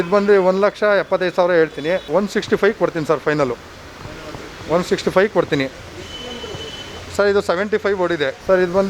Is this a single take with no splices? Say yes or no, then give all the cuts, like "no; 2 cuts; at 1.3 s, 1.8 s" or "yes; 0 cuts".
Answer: yes; 0 cuts